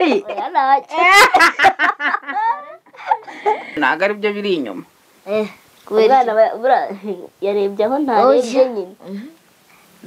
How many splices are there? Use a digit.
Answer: 1